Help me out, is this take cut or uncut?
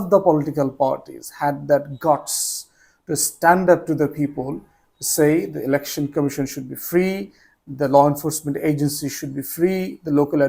uncut